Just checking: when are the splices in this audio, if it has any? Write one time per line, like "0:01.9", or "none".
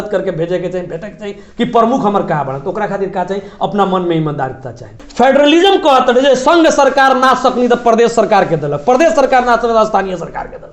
0:05.0

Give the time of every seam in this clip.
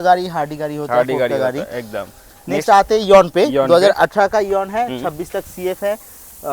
none

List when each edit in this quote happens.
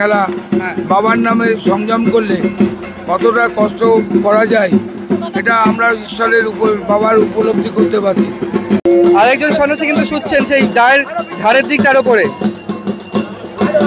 0:08.8

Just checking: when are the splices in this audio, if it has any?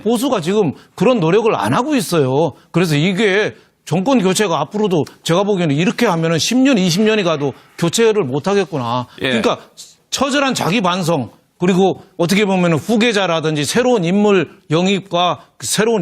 0:13.1

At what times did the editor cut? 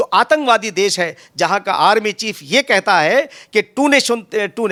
none

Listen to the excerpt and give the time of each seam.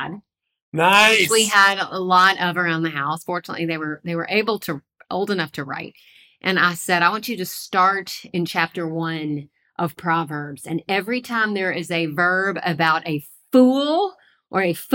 none

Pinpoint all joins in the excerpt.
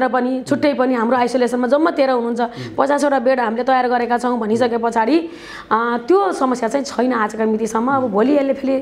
none

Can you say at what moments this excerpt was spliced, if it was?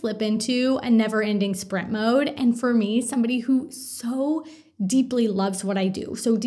none

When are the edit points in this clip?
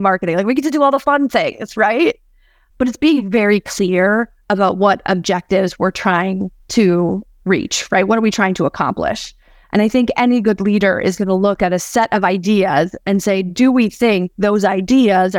0:06.5
0:11.7

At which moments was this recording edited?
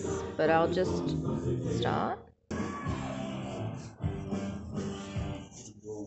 0:02.5

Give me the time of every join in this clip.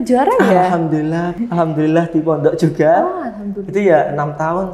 0:01.3

